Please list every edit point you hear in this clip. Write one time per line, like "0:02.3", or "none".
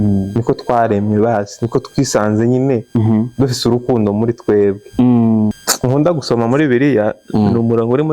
0:05.7